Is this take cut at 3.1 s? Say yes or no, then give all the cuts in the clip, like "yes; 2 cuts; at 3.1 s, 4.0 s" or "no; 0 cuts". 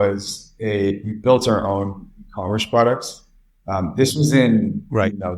no; 0 cuts